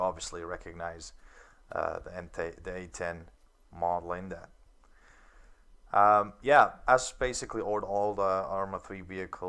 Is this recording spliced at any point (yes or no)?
no